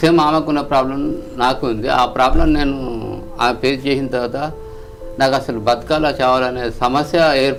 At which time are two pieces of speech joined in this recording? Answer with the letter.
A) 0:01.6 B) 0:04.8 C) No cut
C